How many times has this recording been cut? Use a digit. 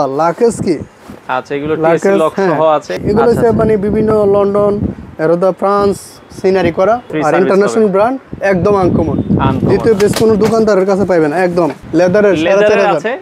3